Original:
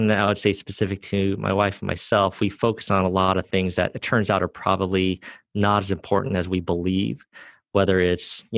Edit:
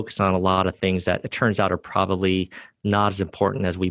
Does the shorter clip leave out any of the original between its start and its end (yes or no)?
no